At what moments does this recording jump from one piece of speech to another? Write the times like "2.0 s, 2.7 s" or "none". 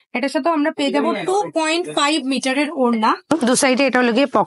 3.3 s